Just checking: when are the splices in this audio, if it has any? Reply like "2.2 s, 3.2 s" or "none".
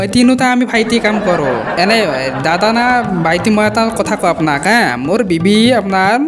1.7 s